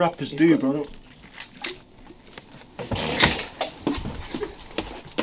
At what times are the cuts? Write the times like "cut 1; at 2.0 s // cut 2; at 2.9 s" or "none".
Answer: none